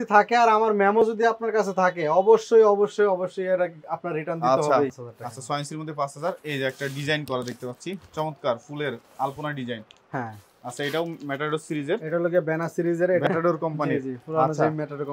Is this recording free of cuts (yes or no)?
no